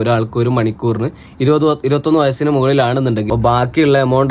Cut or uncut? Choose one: cut